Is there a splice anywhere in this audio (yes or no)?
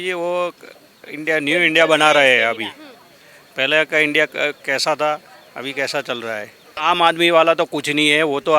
yes